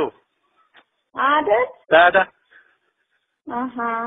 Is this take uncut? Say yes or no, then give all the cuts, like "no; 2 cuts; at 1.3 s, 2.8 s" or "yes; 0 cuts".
no; 1 cut; at 1.4 s